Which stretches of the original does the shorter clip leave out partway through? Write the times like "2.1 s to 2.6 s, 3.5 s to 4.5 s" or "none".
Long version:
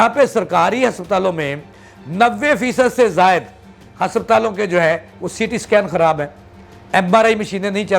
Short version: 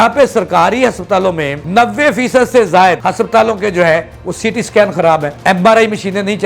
1.5 s to 2.0 s, 3.4 s to 4.0 s, 6.3 s to 6.8 s

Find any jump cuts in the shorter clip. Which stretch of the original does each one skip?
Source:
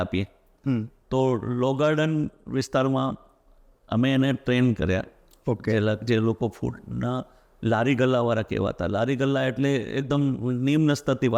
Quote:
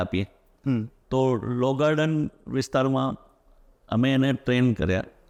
none

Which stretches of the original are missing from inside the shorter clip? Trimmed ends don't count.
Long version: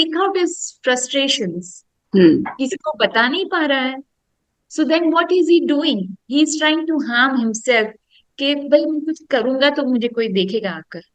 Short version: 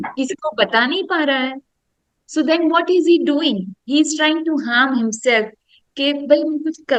none

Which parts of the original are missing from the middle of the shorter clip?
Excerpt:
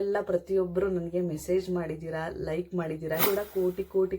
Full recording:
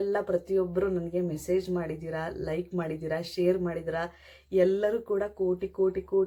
3.2 s to 5.0 s

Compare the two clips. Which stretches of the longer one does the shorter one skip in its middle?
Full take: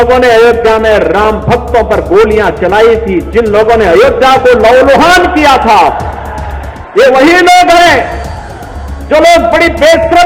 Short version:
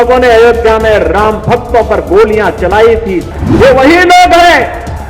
3.2 s to 6.6 s

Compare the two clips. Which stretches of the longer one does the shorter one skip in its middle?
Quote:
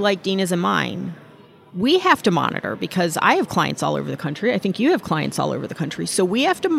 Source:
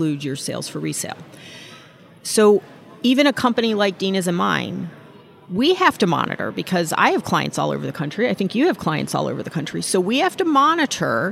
none

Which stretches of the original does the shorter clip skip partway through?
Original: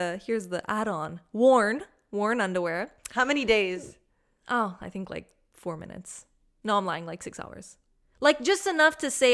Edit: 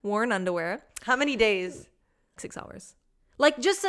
4.4 s to 7.2 s

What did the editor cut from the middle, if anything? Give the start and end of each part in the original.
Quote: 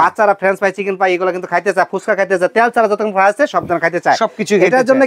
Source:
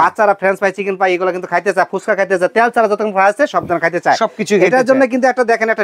none

